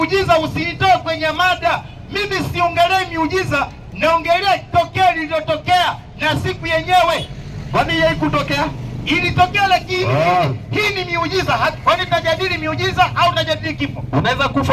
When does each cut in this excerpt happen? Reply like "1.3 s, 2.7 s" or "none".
none